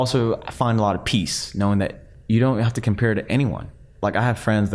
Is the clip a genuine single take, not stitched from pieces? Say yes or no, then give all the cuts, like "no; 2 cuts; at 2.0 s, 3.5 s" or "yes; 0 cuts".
no; 2 cuts; at 2.1 s, 4.0 s